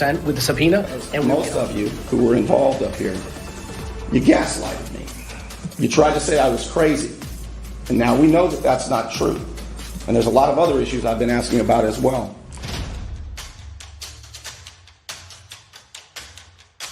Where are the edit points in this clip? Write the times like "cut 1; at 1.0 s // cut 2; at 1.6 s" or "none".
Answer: cut 1; at 12.4 s